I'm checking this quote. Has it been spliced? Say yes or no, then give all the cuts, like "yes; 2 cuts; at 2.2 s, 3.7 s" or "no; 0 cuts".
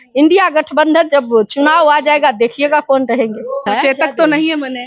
yes; 1 cut; at 3.7 s